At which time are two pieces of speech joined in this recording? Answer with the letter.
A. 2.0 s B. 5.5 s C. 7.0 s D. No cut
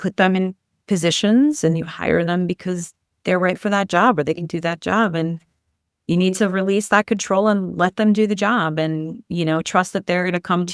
D